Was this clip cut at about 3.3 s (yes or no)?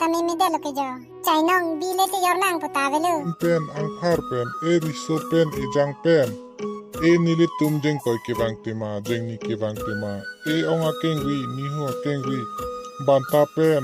yes